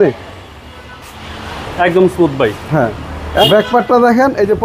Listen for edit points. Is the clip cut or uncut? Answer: cut